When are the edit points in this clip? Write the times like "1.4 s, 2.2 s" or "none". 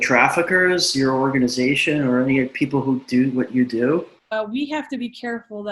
4.3 s